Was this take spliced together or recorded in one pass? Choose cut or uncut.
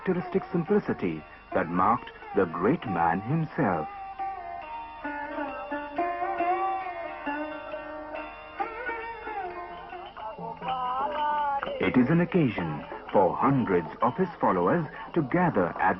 cut